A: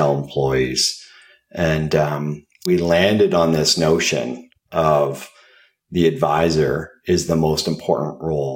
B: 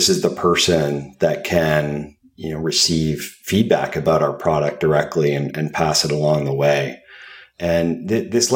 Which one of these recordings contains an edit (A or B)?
A